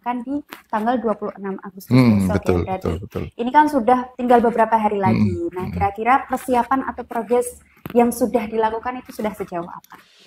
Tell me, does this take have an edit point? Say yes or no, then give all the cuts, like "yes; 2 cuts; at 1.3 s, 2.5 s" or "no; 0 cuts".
no; 0 cuts